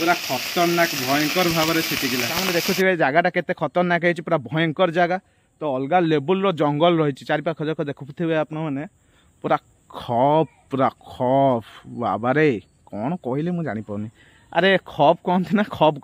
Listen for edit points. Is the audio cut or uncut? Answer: cut